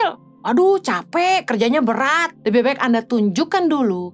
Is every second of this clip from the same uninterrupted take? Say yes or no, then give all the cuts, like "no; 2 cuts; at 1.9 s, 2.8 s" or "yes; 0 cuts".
no; 1 cut; at 2.3 s